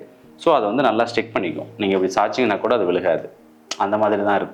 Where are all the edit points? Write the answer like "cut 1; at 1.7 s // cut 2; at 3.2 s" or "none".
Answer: none